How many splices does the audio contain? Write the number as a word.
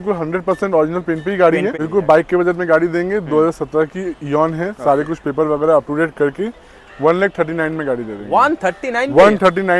one